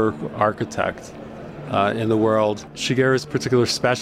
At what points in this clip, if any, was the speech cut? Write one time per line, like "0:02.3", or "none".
0:02.7